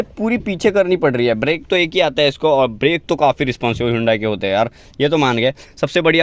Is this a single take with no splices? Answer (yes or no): yes